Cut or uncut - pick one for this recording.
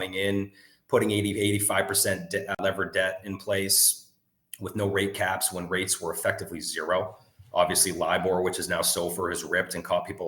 cut